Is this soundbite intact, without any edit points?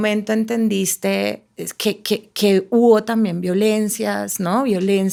yes; 0 cuts

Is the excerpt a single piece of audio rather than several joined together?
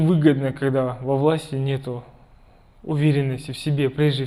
yes; 0 cuts

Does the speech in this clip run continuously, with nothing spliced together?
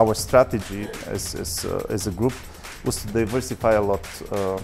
yes; 0 cuts

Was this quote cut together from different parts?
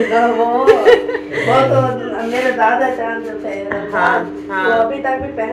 no; 0 cuts

